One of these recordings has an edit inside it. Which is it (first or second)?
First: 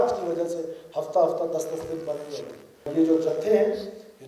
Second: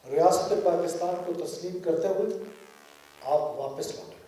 first